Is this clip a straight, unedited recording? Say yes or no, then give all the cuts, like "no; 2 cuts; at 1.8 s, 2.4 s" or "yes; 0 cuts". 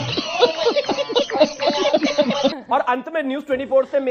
yes; 0 cuts